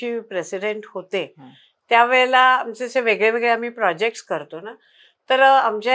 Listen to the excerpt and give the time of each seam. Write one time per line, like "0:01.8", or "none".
none